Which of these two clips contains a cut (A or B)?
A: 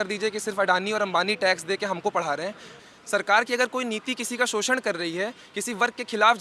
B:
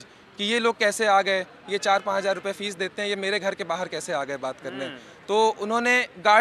A